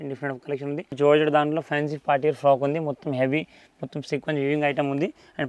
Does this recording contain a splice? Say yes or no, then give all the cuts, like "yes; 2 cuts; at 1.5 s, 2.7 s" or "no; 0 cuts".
yes; 1 cut; at 1.0 s